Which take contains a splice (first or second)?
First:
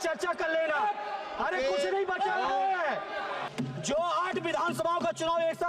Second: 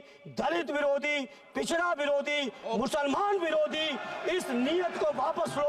first